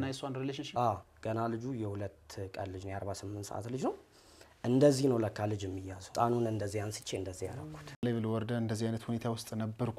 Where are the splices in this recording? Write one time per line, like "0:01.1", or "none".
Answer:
0:01.1
0:06.1
0:08.0